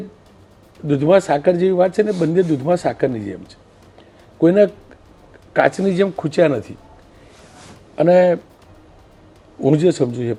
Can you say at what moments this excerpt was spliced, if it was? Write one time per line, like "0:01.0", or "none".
none